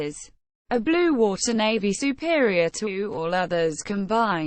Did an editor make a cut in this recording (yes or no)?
no